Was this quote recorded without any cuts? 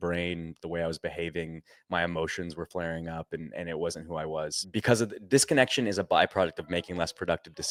yes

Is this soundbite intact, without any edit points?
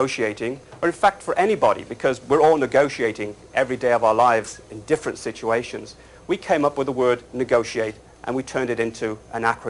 no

